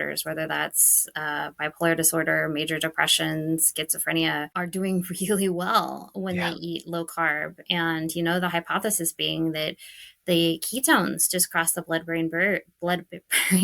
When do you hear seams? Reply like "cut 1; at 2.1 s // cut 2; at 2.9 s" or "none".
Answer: cut 1; at 4.5 s